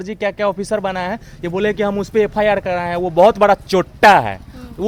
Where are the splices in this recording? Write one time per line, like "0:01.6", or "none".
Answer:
none